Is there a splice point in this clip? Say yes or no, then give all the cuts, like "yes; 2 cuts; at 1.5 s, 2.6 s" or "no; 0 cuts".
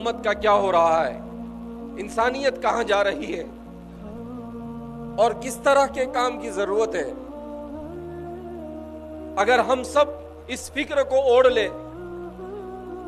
yes; 4 cuts; at 3.5 s, 4.8 s, 7.2 s, 9.3 s